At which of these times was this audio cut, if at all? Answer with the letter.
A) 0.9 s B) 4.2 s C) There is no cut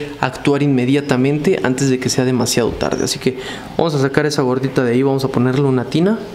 C